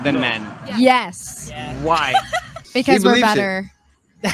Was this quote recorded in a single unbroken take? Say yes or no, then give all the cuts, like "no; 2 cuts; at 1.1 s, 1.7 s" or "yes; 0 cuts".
no; 1 cut; at 2.6 s